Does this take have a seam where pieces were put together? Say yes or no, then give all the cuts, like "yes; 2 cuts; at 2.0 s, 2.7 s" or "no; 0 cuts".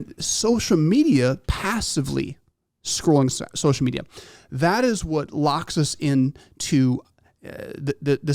no; 0 cuts